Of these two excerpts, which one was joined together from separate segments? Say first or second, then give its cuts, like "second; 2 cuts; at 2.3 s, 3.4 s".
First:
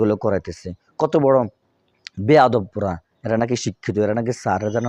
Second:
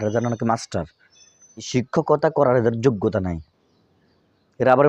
second; 1 cut; at 1.7 s